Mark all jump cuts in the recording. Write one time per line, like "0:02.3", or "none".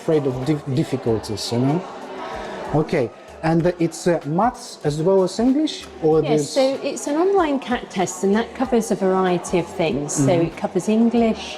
none